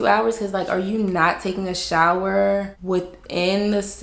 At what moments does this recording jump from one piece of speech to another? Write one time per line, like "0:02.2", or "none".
0:02.8